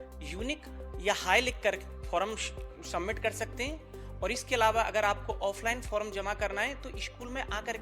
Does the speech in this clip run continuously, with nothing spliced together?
yes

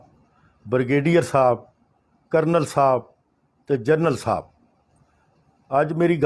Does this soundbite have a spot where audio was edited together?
no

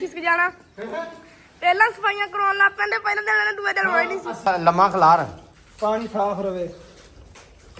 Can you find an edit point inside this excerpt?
yes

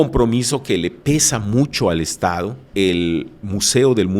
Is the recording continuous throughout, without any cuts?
no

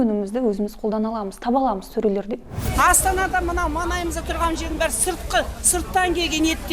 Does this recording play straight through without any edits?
no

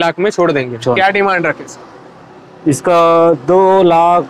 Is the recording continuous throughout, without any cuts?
no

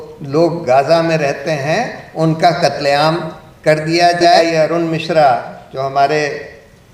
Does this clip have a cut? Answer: yes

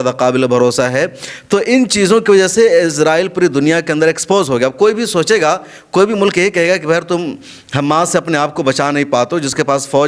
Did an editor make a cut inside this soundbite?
no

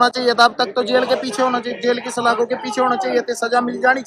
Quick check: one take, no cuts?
yes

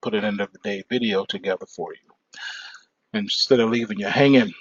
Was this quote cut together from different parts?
no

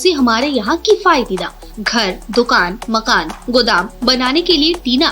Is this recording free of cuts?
yes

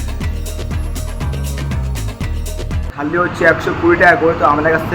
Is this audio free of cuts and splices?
no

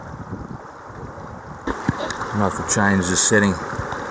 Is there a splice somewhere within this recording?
yes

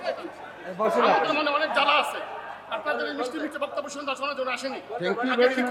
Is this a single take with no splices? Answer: yes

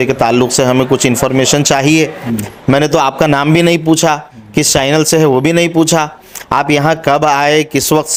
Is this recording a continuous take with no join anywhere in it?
yes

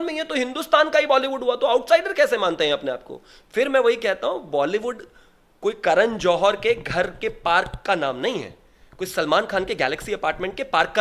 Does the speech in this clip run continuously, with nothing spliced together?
yes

